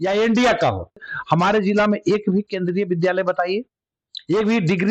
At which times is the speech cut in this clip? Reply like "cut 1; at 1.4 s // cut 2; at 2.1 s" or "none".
cut 1; at 1.1 s